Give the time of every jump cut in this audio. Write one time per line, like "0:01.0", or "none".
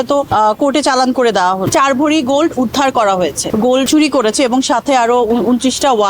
0:01.7
0:03.8